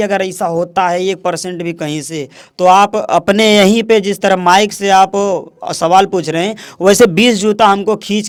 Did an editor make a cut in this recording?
no; 0 cuts

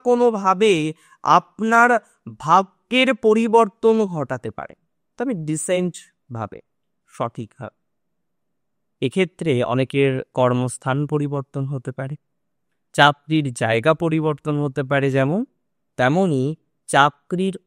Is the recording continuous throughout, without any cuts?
yes; 0 cuts

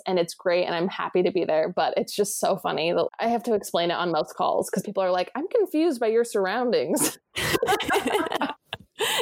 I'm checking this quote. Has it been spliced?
no; 0 cuts

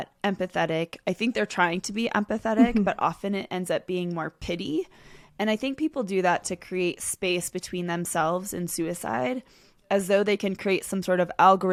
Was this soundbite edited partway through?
no; 0 cuts

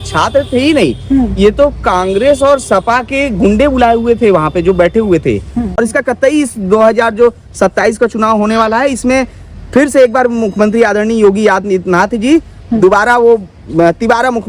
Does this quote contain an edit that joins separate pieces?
yes; 1 cut; at 5.7 s

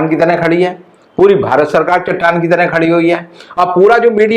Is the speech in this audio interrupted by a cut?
no; 0 cuts

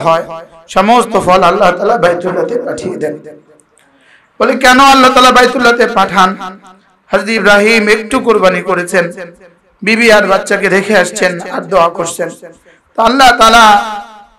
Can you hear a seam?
no; 0 cuts

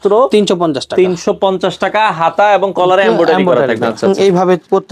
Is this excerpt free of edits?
no; 1 cut; at 4.0 s

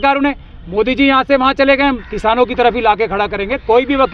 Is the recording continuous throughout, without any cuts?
no; 1 cut; at 2.1 s

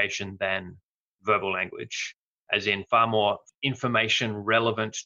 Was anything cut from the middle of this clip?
yes; 1 cut; at 3.5 s

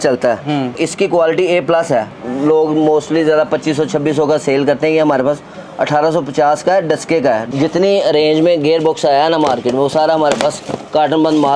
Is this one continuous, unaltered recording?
no; 3 cuts; at 0.8 s, 2.1 s, 7.4 s

